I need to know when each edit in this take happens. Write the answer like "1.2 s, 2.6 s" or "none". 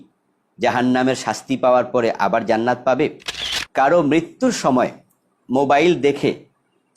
3.5 s